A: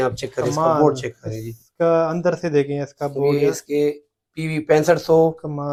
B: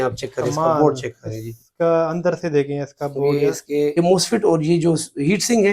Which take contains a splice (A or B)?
B